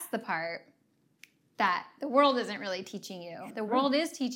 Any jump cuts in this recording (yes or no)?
yes